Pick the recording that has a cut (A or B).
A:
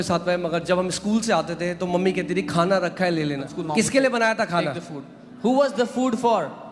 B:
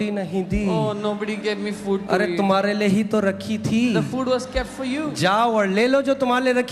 A